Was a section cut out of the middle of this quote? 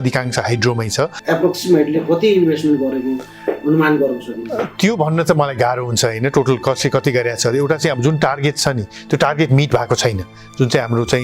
yes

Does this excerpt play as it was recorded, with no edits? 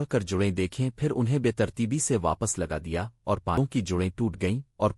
no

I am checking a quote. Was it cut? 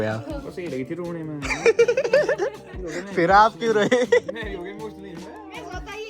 no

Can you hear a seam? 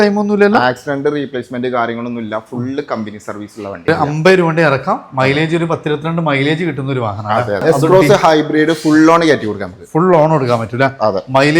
yes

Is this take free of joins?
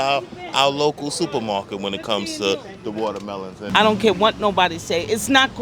no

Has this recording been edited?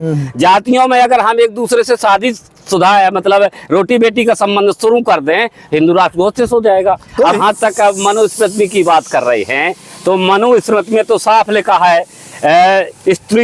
yes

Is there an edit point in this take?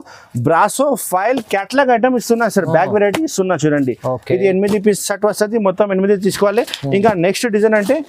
no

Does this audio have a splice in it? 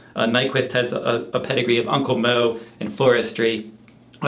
yes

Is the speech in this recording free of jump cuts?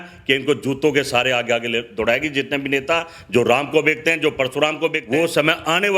no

